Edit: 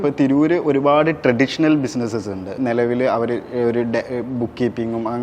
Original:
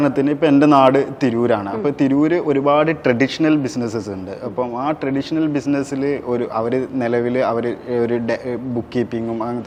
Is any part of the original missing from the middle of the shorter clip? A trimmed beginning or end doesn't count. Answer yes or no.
yes